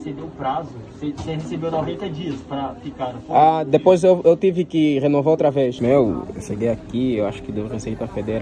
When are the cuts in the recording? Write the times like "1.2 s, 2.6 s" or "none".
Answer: 5.8 s